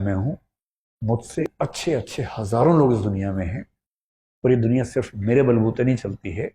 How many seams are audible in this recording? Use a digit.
1